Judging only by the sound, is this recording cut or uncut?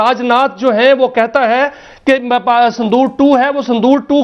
uncut